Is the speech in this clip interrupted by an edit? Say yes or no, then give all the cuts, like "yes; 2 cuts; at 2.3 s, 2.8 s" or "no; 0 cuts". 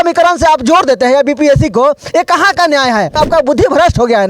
yes; 1 cut; at 3.2 s